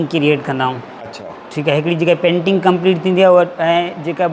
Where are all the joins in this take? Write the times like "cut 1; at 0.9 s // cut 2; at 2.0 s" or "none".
none